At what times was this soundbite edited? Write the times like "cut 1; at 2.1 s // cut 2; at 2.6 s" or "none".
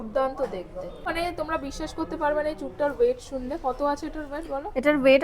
cut 1; at 1.1 s